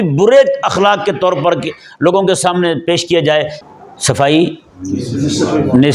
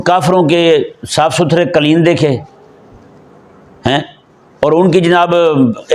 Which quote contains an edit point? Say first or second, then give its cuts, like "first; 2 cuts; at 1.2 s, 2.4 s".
first; 1 cut; at 3.6 s